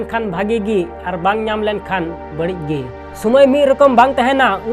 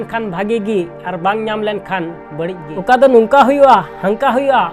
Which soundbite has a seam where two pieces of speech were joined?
second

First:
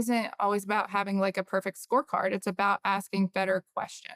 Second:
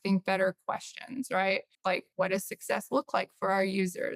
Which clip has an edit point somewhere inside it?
second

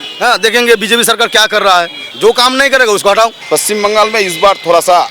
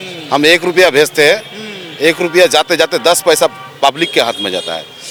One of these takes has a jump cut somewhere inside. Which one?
first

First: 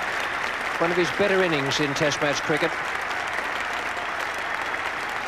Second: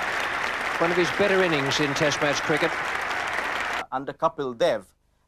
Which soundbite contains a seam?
first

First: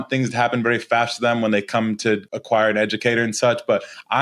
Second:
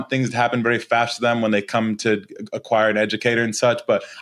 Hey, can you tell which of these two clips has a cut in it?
first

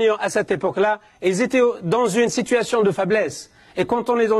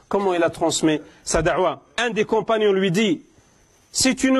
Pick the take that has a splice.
second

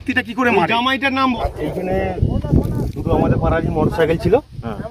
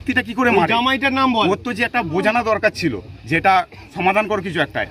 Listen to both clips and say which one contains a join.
first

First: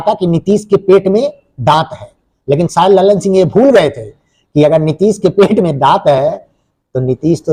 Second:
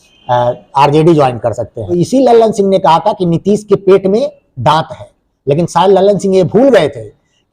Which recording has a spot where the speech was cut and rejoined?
second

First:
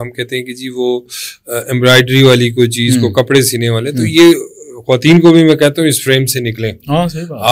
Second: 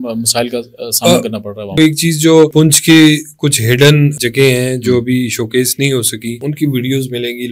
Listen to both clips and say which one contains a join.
second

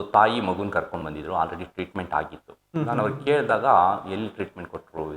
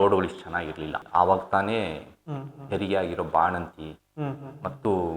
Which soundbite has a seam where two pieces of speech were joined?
second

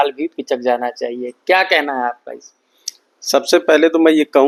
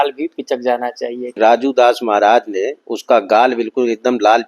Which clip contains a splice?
second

